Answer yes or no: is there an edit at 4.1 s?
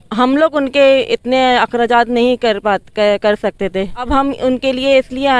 yes